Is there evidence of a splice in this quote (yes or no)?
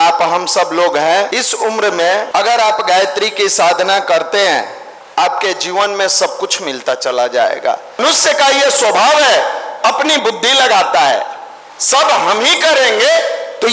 yes